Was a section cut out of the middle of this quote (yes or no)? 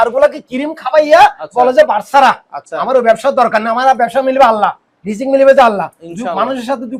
no